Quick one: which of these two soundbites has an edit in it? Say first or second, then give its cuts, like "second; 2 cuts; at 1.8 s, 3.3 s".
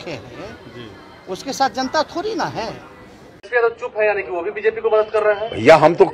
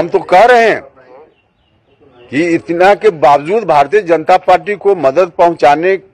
first; 1 cut; at 3.5 s